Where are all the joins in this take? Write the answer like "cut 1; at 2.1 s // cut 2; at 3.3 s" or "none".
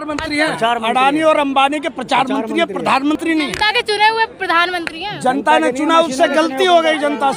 none